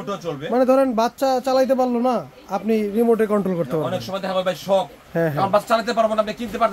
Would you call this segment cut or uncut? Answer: cut